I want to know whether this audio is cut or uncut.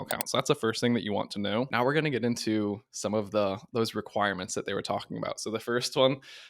cut